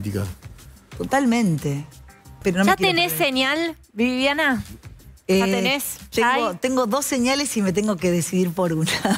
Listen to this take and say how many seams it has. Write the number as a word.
one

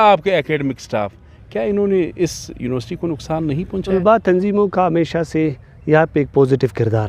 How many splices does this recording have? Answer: one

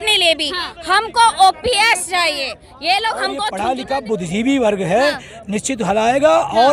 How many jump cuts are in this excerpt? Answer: one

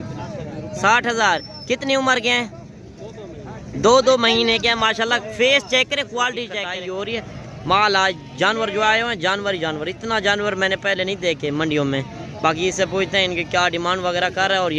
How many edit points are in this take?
one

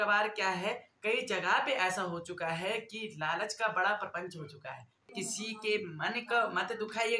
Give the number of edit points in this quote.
one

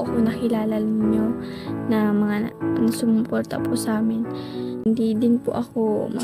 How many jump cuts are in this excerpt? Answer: one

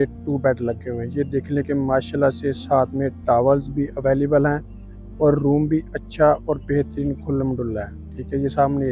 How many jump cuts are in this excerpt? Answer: zero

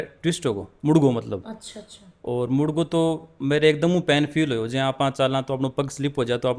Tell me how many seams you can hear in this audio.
zero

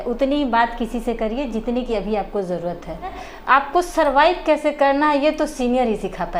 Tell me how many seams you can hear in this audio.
one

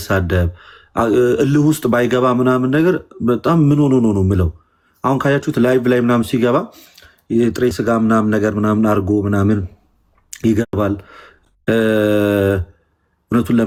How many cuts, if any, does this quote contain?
zero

